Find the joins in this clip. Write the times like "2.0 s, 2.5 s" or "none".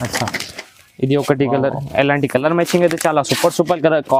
none